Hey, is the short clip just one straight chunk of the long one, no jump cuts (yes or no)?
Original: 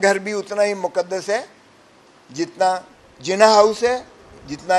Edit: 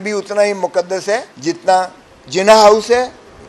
no